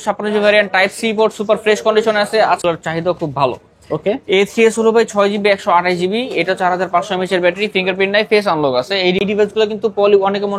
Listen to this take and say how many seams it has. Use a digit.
2